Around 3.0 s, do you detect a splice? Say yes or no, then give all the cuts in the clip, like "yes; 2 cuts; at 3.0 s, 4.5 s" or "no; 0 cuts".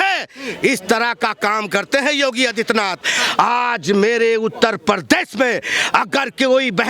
yes; 1 cut; at 3.0 s